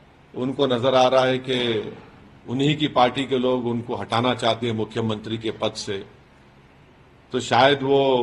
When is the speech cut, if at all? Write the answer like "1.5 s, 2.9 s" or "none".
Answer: none

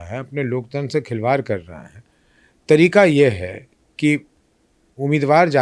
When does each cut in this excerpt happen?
none

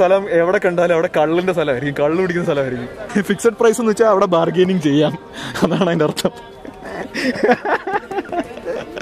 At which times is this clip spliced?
3.0 s

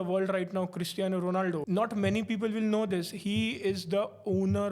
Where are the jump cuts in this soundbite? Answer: 1.6 s

